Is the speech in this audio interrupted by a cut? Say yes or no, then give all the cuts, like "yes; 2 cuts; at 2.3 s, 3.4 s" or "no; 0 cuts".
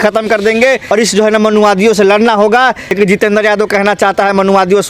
yes; 2 cuts; at 0.8 s, 2.9 s